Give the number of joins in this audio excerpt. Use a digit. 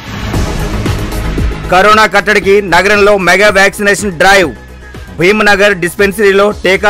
0